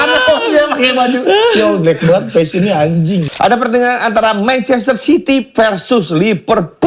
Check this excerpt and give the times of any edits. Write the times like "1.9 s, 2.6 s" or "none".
3.3 s